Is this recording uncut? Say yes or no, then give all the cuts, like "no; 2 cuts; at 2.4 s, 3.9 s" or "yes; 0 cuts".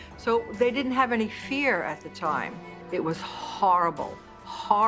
no; 1 cut; at 2.6 s